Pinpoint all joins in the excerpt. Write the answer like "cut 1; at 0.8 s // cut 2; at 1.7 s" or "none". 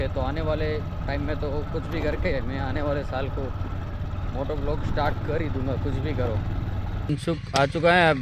cut 1; at 7.1 s